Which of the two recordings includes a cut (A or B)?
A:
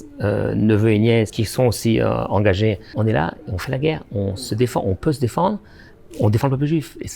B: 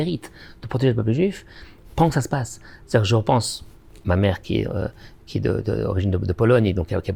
A